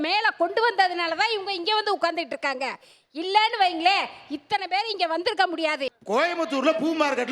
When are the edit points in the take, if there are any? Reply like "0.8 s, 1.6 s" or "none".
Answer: 5.9 s